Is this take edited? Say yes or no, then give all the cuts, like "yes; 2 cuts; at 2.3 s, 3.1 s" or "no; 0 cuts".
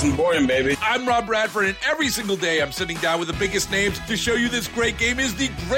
no; 0 cuts